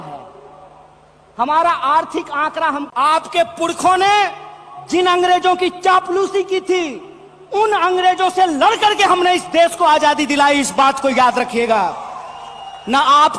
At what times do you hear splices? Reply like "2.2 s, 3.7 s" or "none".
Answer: 2.9 s

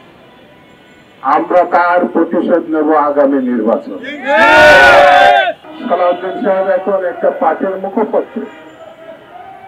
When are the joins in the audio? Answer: 5.6 s

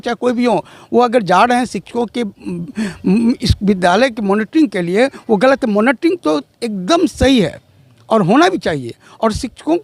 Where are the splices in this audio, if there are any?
none

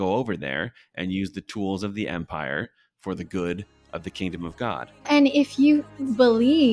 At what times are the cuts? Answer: 5.1 s

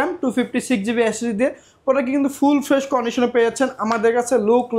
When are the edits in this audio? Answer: none

